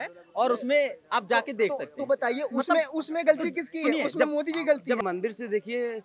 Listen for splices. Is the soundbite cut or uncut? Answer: cut